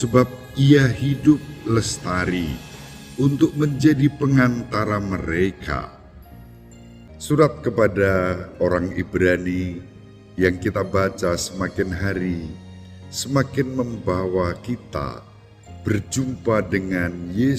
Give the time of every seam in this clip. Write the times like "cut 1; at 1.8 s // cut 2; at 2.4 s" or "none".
cut 1; at 7.0 s

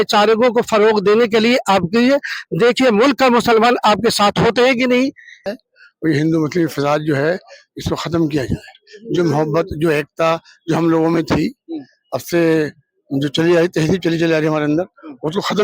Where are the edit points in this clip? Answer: cut 1; at 5.6 s

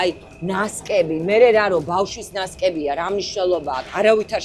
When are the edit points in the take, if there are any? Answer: none

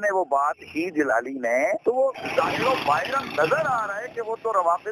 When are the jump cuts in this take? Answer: cut 1; at 2.2 s

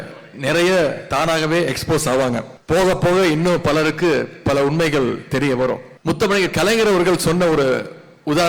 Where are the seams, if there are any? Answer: cut 1; at 2.5 s // cut 2; at 5.9 s

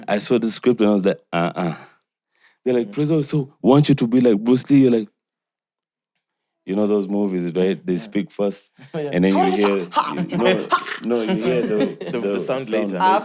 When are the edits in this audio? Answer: none

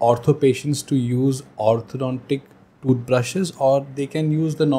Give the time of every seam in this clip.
none

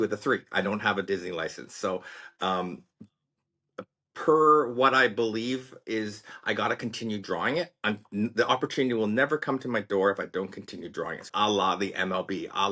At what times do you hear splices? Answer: cut 1; at 11.2 s

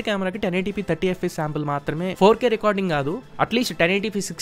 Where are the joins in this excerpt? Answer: cut 1; at 2.1 s

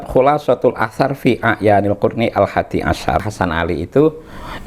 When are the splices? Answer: cut 1; at 3.3 s

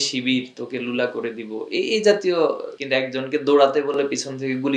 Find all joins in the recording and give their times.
cut 1; at 2.7 s

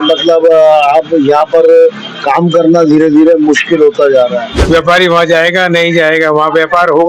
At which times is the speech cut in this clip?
cut 1; at 4.5 s

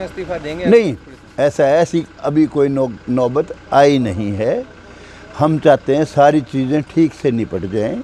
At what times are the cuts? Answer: none

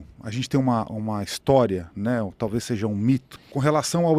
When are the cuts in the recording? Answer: none

